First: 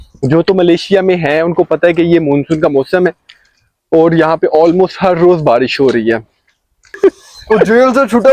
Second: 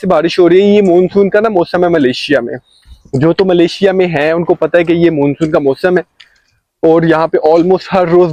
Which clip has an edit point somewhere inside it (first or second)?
first